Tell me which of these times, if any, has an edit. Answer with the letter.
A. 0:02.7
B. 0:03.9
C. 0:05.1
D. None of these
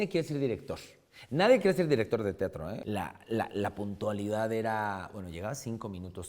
A